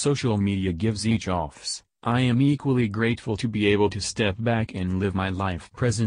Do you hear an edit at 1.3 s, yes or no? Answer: no